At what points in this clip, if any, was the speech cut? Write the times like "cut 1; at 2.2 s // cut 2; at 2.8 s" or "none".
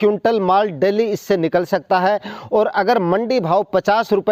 none

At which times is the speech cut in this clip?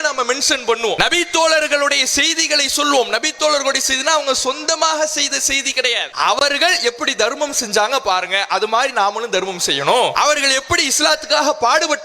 cut 1; at 1.0 s // cut 2; at 6.4 s // cut 3; at 10.1 s

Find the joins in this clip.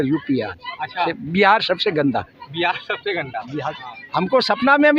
cut 1; at 1.1 s // cut 2; at 3.7 s

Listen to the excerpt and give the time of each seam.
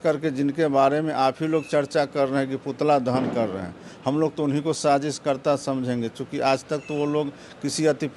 none

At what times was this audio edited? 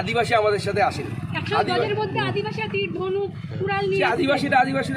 none

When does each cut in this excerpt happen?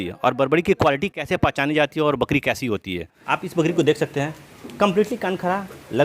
cut 1; at 3.1 s

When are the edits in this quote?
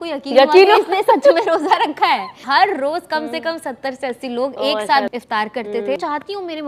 cut 1; at 2.4 s // cut 2; at 5.1 s // cut 3; at 6.0 s

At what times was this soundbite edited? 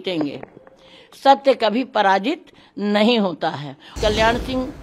cut 1; at 3.9 s

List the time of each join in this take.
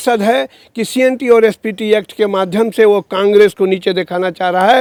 none

